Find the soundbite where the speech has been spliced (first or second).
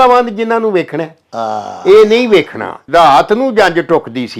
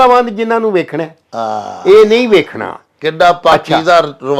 first